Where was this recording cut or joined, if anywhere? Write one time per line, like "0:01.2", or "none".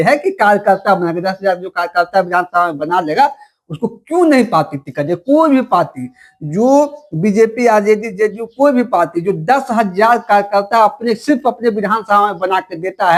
none